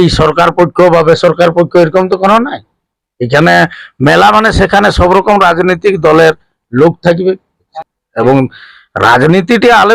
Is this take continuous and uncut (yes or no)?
no